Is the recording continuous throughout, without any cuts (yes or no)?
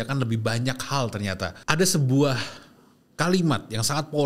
no